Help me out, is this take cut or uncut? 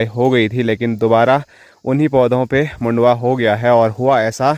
uncut